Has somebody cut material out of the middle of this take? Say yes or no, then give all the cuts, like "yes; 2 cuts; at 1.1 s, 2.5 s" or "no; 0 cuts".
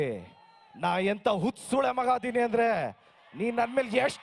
no; 0 cuts